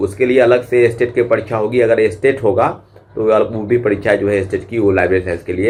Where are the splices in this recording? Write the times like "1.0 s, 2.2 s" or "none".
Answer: none